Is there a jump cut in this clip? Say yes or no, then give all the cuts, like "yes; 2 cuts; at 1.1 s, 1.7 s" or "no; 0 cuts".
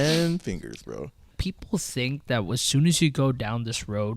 yes; 1 cut; at 1.3 s